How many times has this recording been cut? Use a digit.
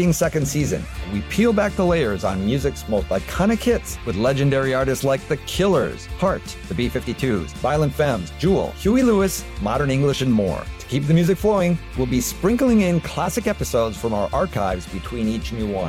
0